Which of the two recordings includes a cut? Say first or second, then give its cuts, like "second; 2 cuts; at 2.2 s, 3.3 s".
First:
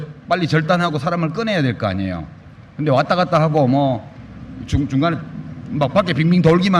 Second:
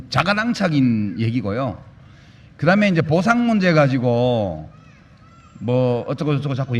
first; 1 cut; at 1.4 s